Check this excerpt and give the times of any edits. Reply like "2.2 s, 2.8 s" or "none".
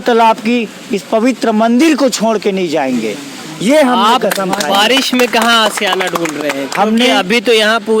none